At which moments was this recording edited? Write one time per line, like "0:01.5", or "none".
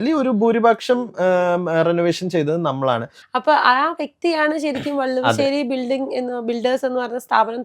0:03.2